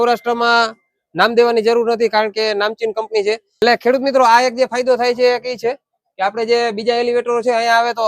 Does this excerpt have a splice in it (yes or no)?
yes